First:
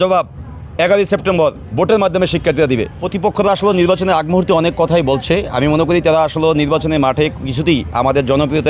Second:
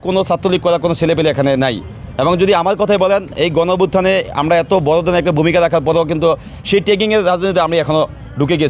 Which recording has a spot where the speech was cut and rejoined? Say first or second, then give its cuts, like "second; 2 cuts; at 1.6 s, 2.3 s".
first; 1 cut; at 3.1 s